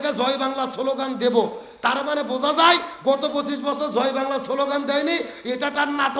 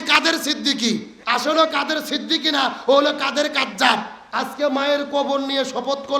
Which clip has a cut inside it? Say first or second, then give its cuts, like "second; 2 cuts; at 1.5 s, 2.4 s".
second; 2 cuts; at 1.1 s, 4.2 s